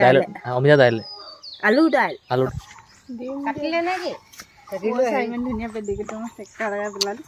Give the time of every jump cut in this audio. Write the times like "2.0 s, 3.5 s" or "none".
2.5 s